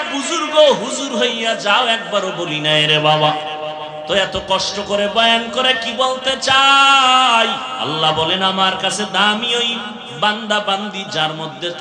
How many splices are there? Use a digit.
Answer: 1